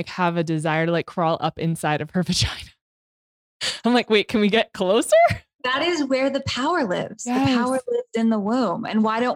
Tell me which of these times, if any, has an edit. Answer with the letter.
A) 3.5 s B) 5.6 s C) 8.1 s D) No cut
B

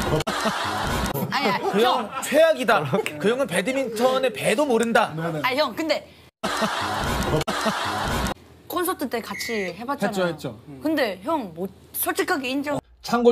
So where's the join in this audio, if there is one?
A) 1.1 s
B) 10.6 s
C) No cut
A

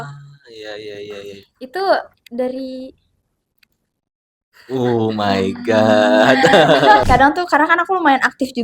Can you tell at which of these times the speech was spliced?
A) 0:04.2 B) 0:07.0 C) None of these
B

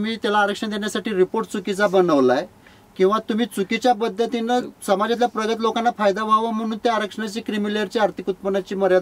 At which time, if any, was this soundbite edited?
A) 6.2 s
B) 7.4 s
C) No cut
C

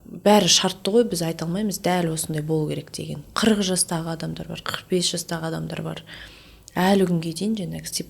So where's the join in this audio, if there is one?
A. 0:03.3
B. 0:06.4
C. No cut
A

